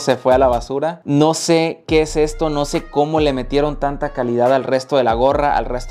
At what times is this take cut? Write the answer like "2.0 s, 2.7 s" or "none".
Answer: none

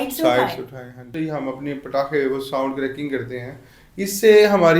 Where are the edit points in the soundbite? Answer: 1.1 s

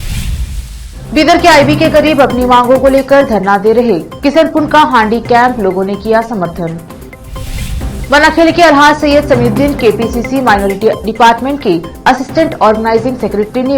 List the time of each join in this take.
0.9 s

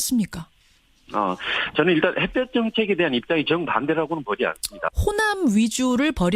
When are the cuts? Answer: 4.9 s

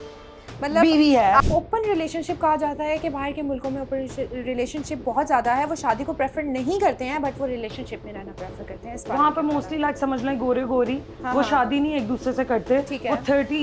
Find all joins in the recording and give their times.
1.4 s

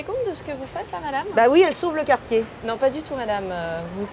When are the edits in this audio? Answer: none

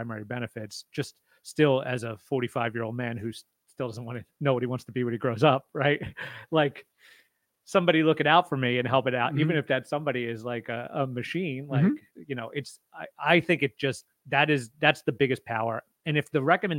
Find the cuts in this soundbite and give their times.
none

